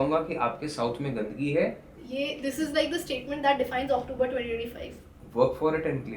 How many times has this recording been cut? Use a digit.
1